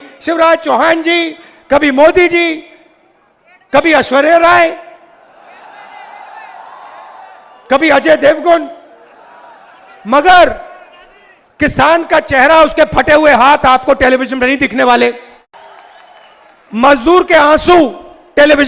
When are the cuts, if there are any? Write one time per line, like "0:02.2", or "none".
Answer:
0:15.5